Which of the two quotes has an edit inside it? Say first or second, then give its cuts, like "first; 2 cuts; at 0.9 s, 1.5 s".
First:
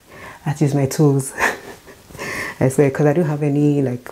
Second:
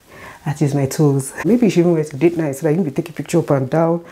second; 1 cut; at 1.4 s